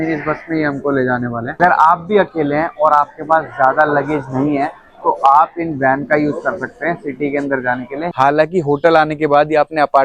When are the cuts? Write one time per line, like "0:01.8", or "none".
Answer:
0:01.5
0:08.1

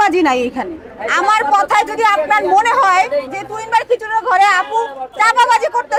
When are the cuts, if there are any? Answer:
none

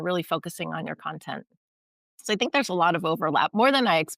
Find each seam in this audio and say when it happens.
none

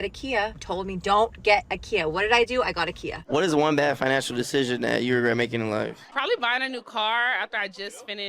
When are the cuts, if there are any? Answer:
0:03.1
0:06.0

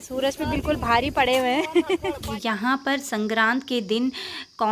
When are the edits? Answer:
0:02.3

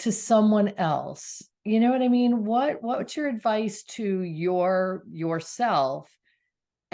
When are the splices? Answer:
none

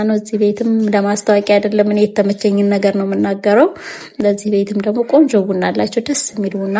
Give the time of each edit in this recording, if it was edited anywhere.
none

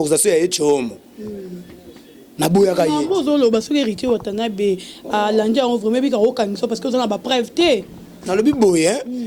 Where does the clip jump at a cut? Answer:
none

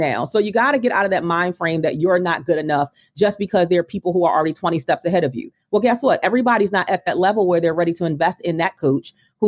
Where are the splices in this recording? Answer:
none

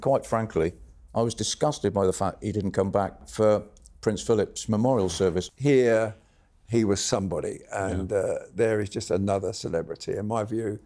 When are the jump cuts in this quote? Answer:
0:03.2
0:05.5

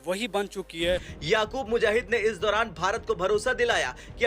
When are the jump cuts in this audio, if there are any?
0:01.0

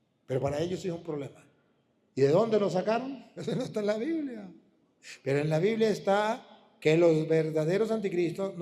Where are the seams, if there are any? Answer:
0:03.3

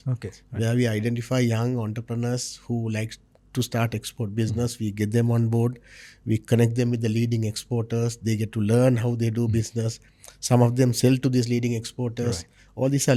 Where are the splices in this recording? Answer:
none

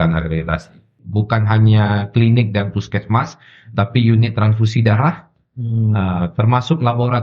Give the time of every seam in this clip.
0:01.0

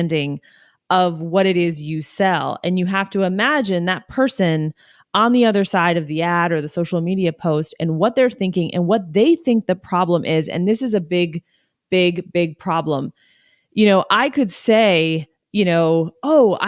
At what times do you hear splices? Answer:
none

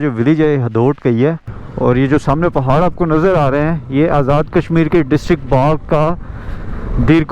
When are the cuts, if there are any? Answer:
0:01.6

